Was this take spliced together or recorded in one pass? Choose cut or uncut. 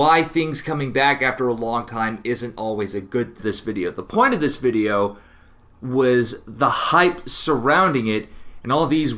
uncut